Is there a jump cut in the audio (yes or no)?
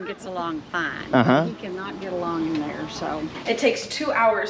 yes